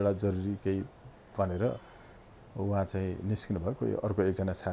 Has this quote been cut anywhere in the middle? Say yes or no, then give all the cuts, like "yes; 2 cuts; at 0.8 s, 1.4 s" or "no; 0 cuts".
no; 0 cuts